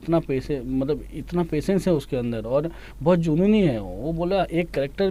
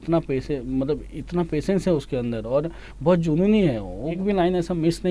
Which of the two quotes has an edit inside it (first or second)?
second